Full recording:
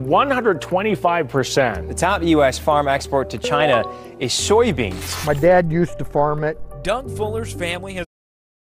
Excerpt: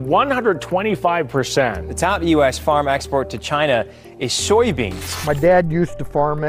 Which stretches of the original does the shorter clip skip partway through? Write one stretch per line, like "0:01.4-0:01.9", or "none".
none